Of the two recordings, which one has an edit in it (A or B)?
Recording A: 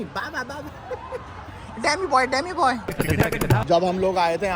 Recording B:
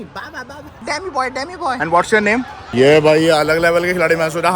B